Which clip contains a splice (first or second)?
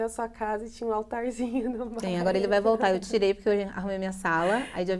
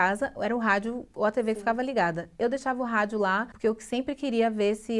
second